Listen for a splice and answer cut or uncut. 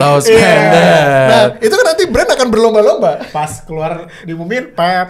uncut